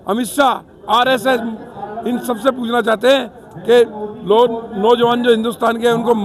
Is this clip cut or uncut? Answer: uncut